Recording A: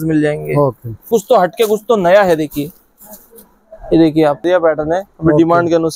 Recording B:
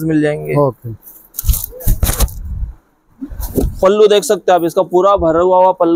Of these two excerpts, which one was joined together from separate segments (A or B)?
A